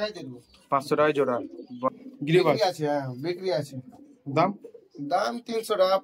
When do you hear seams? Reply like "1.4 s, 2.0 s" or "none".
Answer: 1.9 s